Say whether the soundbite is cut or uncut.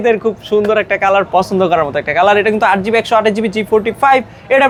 uncut